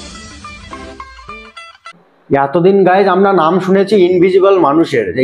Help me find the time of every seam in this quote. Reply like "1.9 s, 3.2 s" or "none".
2.1 s